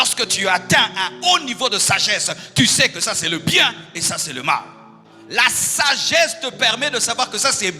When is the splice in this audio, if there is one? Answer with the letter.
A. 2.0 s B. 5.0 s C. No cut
C